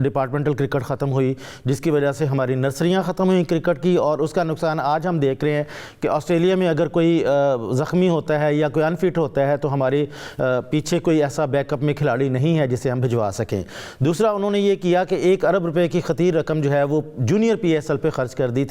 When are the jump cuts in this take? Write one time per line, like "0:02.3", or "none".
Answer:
none